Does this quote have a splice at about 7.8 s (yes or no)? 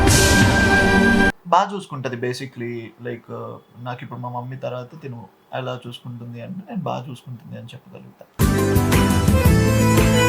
no